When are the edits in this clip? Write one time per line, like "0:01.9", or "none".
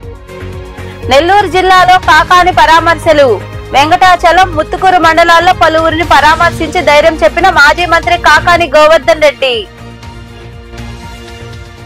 0:01.1